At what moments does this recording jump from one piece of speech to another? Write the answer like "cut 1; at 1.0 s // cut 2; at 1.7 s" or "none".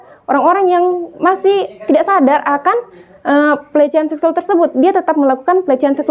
none